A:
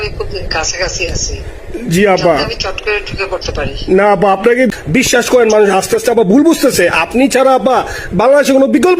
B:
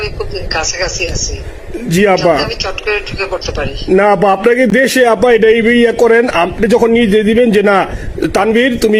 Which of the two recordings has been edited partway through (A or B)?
A